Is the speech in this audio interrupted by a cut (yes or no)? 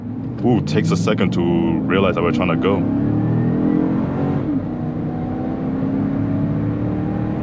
no